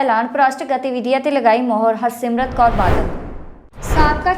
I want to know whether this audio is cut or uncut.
uncut